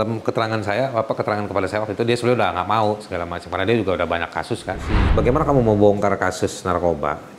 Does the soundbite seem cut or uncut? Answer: cut